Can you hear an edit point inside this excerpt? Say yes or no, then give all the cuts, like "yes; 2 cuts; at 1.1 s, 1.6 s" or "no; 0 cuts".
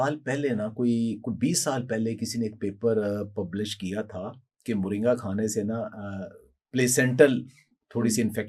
no; 0 cuts